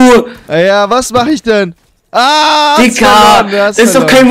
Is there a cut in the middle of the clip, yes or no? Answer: no